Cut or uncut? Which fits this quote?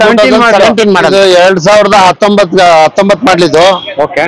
cut